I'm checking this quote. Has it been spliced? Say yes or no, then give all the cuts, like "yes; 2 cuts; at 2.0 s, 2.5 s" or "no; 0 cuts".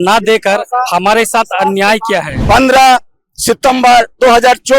yes; 1 cut; at 2.3 s